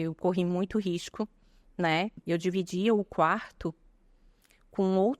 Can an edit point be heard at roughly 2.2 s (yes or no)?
yes